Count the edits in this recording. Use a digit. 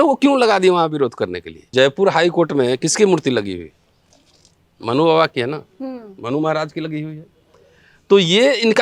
1